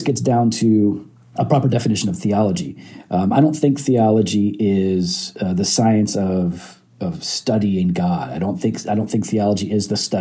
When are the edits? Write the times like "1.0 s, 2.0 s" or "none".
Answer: 1.1 s